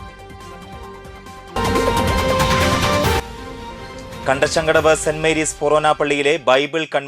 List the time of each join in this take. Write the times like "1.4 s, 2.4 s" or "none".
1.4 s